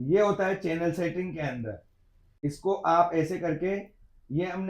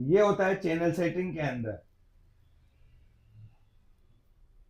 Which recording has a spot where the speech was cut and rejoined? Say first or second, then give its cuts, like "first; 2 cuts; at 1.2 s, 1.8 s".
first; 1 cut; at 2.4 s